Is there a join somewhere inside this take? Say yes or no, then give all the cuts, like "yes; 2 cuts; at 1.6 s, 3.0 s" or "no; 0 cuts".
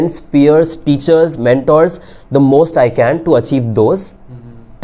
no; 0 cuts